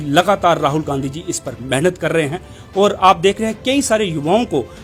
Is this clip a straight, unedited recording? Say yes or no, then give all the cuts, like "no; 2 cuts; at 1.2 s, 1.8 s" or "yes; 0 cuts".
yes; 0 cuts